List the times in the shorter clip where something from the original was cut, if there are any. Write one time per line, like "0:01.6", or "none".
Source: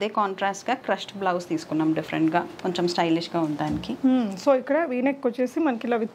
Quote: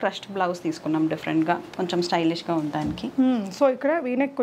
none